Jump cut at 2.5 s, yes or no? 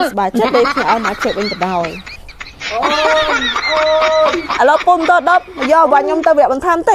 no